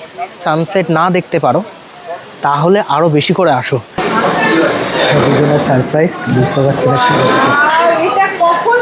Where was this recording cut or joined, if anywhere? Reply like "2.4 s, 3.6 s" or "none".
4.0 s

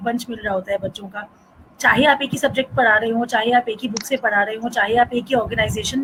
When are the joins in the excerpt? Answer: none

